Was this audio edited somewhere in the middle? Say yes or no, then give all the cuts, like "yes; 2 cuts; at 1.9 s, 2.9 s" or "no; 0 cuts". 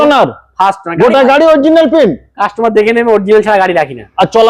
no; 0 cuts